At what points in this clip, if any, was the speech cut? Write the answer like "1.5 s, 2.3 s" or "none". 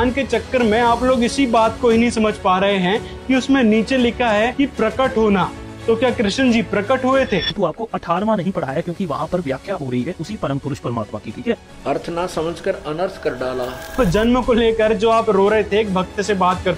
7.5 s, 14.0 s

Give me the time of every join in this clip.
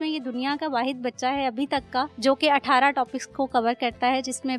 2.1 s

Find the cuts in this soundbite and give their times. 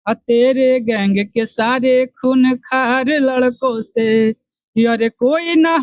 none

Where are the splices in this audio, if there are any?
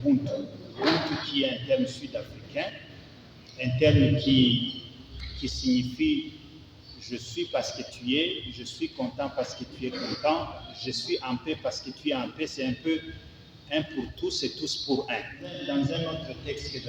10.7 s, 15.6 s

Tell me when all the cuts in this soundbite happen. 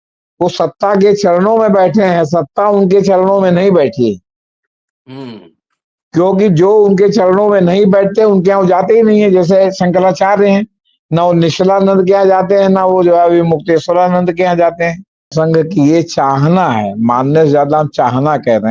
15.3 s

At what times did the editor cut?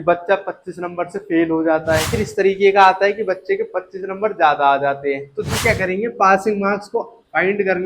2.2 s, 5.5 s

